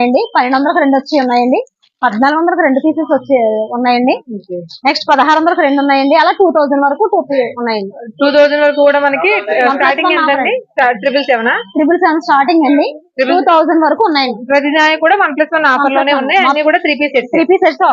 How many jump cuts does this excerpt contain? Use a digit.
0